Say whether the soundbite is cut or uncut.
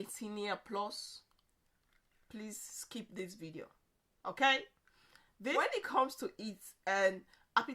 cut